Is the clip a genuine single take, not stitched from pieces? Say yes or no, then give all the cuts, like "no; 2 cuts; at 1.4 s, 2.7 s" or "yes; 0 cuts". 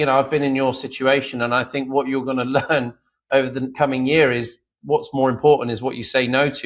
yes; 0 cuts